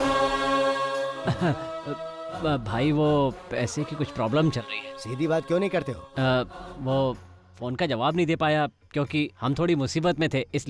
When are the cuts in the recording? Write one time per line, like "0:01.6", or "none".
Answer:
0:01.2